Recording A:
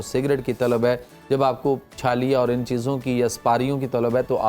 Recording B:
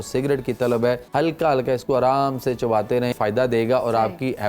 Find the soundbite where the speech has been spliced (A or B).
B